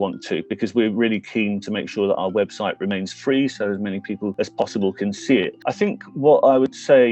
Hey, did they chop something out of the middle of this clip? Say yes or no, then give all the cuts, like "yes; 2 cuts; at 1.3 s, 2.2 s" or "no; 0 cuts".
yes; 1 cut; at 5.6 s